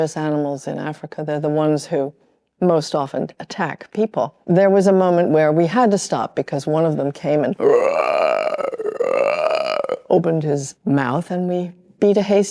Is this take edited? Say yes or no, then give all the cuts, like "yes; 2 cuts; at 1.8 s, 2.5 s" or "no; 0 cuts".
no; 0 cuts